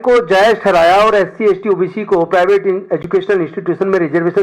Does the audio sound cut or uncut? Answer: uncut